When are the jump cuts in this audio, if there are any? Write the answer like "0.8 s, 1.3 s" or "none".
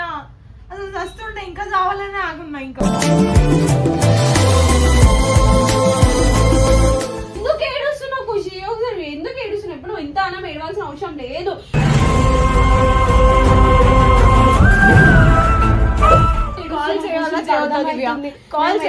7.3 s, 16.6 s